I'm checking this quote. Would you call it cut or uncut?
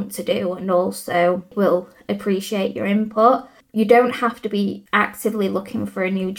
cut